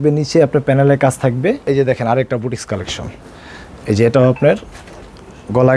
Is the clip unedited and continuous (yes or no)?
no